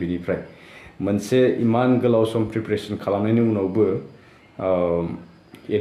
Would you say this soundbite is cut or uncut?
uncut